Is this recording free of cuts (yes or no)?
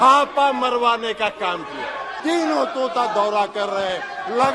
no